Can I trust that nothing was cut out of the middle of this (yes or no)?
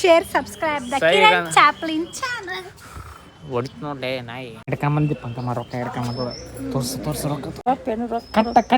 no